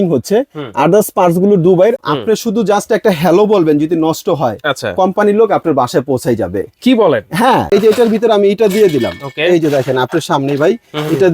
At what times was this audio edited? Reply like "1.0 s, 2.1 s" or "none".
2.0 s, 7.6 s